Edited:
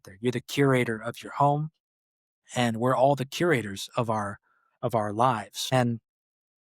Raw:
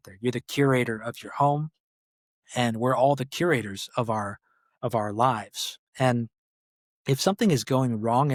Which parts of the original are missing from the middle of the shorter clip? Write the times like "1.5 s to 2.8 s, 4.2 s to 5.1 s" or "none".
5.5 s to 5.8 s